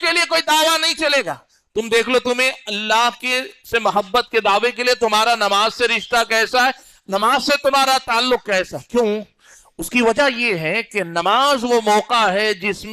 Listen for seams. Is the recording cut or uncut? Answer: uncut